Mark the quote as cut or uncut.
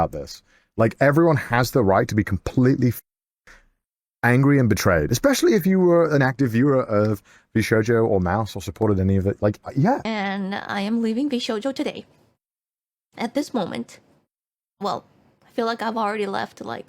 cut